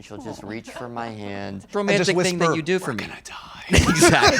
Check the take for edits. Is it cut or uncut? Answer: cut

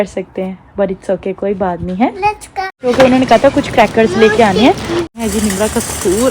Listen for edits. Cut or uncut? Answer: cut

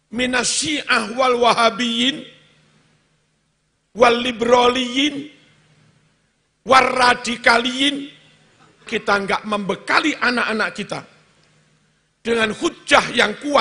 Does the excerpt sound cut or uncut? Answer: cut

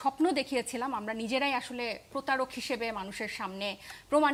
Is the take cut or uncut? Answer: uncut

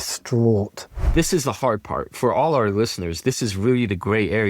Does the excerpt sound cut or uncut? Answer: cut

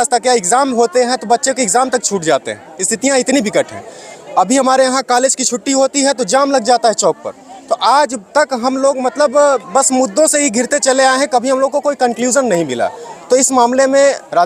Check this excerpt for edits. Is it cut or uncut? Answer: uncut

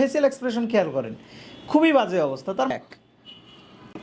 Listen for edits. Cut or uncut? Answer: cut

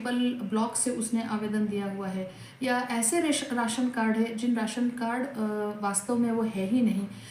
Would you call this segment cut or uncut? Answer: uncut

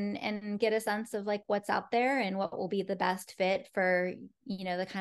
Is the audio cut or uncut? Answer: uncut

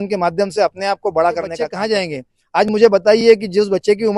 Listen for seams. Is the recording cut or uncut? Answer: cut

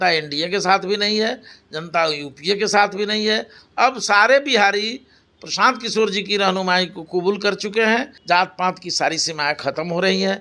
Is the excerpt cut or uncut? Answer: cut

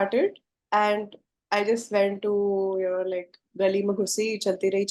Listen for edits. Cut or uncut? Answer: uncut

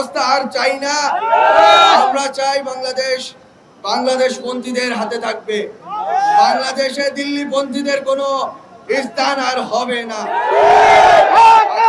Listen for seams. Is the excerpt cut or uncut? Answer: uncut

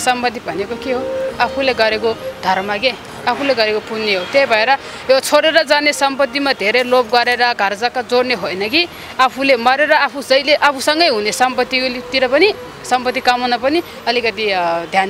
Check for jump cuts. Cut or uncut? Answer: uncut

